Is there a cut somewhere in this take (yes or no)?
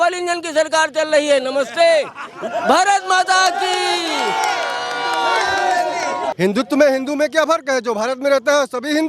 yes